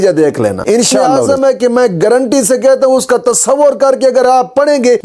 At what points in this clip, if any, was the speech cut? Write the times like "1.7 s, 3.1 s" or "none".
1.0 s